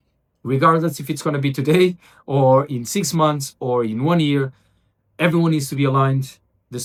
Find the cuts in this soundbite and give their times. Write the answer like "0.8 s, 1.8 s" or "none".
none